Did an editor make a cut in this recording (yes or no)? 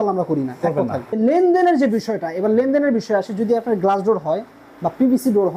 yes